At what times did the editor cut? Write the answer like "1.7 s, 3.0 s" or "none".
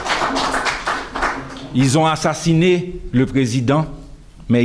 none